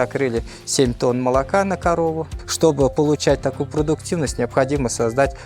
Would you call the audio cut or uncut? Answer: cut